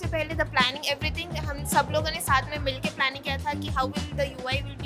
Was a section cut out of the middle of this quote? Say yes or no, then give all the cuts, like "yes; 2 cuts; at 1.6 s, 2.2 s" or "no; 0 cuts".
no; 0 cuts